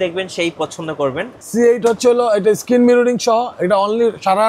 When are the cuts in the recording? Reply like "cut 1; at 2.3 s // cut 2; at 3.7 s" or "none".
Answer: cut 1; at 1.4 s